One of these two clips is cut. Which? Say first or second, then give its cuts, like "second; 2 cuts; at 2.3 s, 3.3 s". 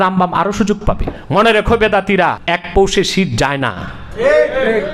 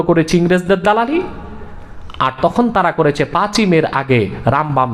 first; 2 cuts; at 1.1 s, 2.4 s